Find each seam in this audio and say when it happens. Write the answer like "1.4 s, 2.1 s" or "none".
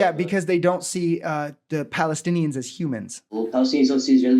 none